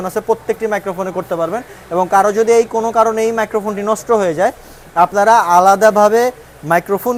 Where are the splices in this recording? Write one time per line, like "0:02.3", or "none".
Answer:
none

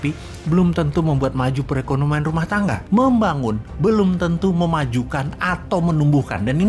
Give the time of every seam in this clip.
0:02.8

